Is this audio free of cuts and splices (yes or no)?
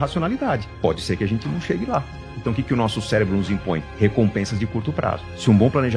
yes